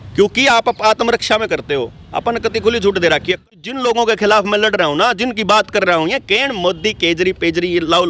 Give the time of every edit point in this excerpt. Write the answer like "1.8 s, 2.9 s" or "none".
3.5 s